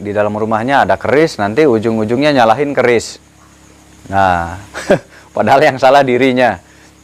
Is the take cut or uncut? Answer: uncut